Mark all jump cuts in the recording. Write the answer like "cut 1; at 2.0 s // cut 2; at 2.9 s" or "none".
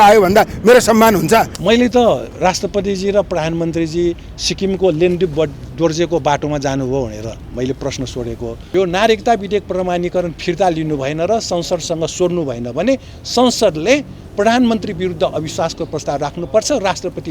cut 1; at 1.5 s // cut 2; at 8.5 s